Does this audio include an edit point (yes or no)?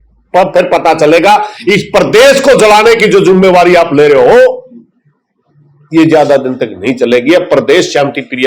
no